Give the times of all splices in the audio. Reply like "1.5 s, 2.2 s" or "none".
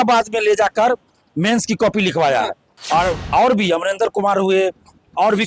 2.7 s